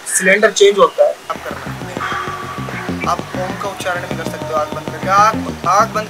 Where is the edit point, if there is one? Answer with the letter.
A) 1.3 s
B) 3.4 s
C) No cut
A